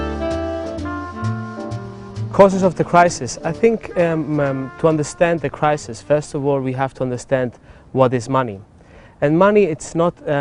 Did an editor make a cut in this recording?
yes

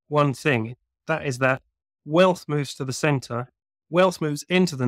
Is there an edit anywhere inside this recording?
no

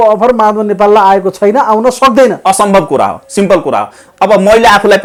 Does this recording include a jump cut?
no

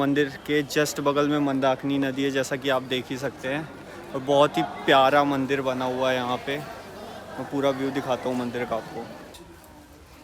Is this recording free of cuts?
no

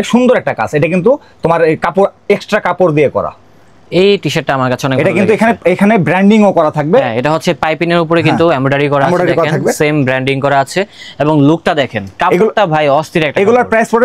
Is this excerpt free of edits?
yes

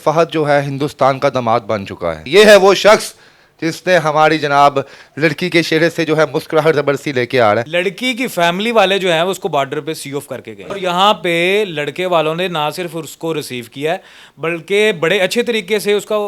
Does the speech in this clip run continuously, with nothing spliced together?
no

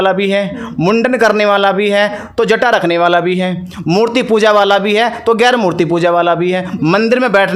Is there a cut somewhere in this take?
no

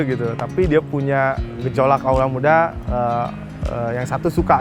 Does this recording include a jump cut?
yes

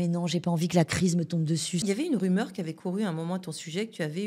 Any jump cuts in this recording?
yes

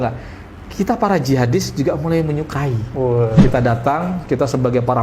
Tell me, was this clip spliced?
yes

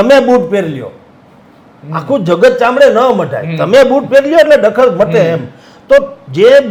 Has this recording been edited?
no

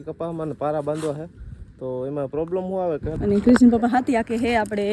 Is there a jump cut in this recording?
yes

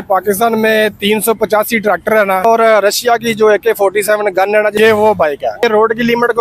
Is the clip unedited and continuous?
no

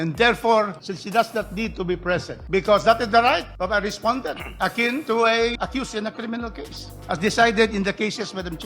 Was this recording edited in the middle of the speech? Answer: no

